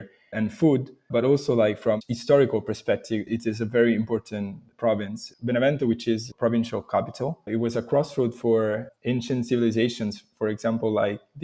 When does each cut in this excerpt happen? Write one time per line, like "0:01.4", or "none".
0:02.0
0:03.3
0:06.3
0:07.4